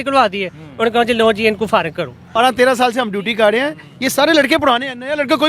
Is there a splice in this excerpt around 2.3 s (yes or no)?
yes